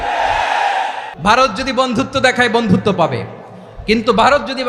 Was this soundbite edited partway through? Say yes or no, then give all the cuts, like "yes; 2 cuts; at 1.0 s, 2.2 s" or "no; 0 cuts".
yes; 1 cut; at 1.0 s